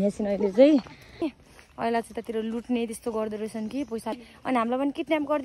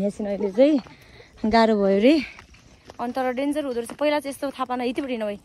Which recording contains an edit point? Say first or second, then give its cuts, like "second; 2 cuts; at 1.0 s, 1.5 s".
first; 2 cuts; at 1.3 s, 4.2 s